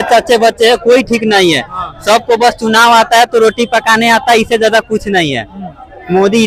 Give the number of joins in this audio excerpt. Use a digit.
0